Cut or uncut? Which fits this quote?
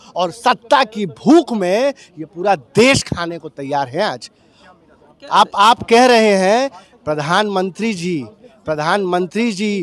uncut